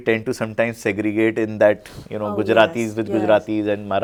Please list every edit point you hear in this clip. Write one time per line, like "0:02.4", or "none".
none